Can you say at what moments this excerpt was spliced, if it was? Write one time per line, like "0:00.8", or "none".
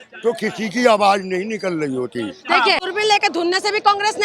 0:02.8

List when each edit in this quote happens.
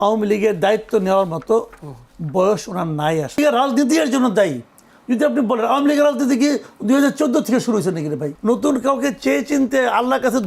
0:03.4
0:08.3

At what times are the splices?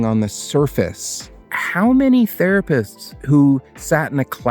0:01.6

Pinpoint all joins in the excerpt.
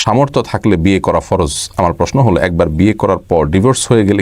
none

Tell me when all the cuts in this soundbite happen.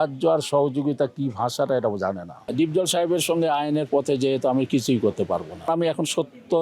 0:02.5
0:05.7

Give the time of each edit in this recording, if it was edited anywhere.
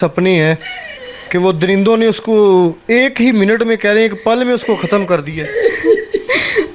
none

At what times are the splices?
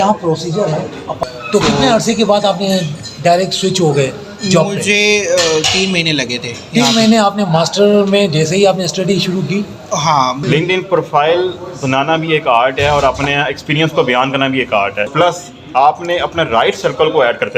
0:01.2
0:10.4
0:15.1

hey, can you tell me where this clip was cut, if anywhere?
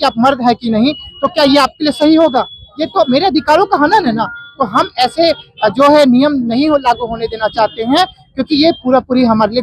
none

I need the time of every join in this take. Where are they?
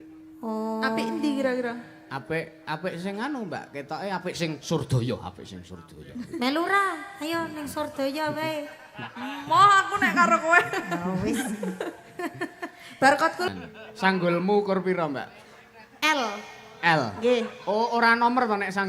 0:13.5

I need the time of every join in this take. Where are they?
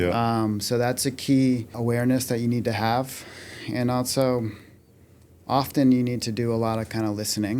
0:01.8

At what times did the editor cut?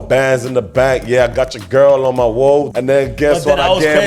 0:02.7

